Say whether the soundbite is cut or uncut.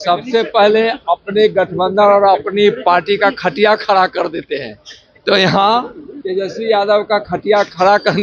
uncut